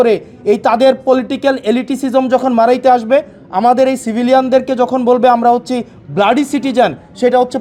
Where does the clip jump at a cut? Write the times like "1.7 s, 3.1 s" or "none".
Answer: none